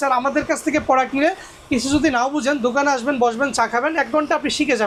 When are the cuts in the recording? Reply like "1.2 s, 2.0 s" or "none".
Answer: none